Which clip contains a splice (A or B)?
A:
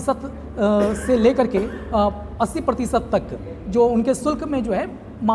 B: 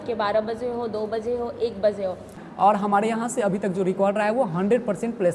B